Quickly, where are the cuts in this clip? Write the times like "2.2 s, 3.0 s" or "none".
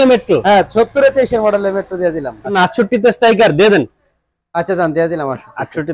2.5 s